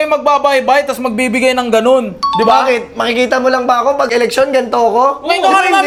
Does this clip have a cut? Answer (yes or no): no